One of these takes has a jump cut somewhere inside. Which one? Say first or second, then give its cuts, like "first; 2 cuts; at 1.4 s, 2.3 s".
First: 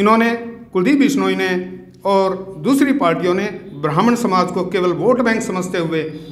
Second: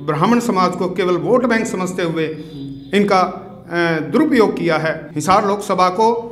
second; 1 cut; at 5.1 s